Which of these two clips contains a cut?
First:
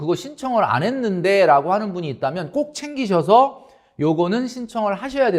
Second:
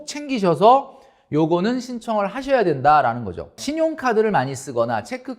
second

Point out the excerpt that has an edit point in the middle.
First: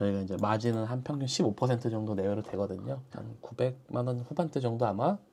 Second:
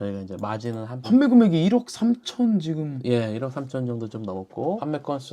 second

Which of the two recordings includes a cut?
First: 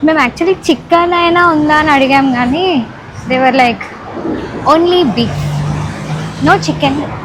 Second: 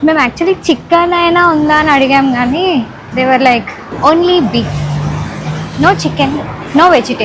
second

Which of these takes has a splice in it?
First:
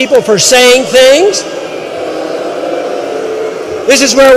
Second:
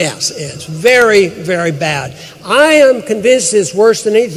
second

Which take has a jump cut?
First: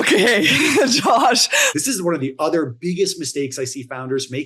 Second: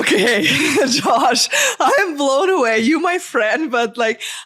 first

